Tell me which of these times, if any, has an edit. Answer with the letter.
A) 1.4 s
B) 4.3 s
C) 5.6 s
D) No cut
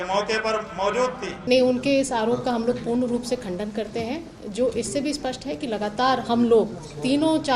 A